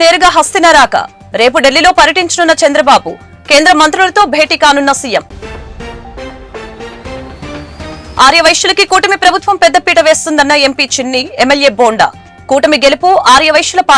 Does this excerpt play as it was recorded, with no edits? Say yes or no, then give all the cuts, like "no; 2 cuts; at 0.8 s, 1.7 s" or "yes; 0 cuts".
yes; 0 cuts